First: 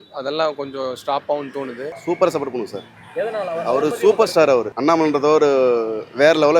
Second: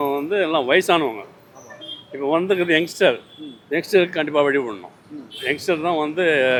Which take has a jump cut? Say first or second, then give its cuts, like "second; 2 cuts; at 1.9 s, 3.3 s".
first; 2 cuts; at 1.9 s, 4.7 s